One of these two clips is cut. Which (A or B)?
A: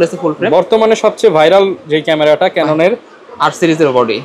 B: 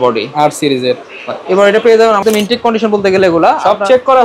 B